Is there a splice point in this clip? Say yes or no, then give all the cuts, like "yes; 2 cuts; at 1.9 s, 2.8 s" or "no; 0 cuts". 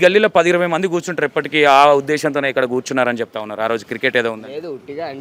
no; 0 cuts